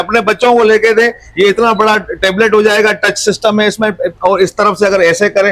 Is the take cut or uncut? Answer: uncut